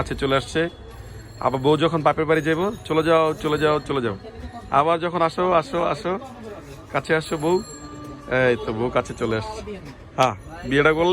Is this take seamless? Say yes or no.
yes